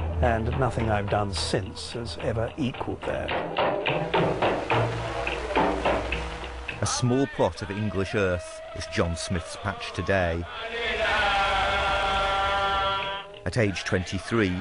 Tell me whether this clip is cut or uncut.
cut